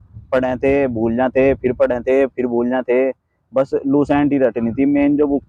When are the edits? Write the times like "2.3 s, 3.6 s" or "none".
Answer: none